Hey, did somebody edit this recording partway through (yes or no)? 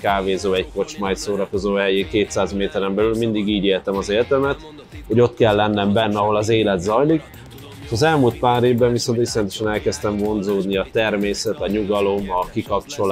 no